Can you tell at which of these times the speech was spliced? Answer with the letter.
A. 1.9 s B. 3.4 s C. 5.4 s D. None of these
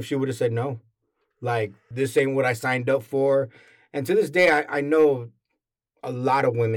A